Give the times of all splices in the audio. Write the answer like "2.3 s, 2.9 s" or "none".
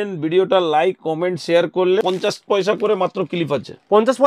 2.0 s